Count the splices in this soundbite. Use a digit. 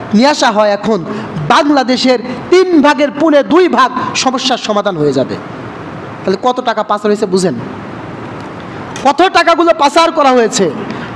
0